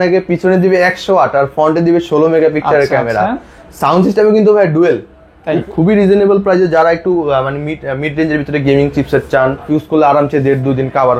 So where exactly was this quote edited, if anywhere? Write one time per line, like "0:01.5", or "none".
0:05.6
0:09.7